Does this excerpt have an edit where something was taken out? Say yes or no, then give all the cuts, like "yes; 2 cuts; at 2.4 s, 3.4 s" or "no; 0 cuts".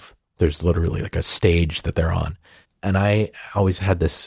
yes; 1 cut; at 1.9 s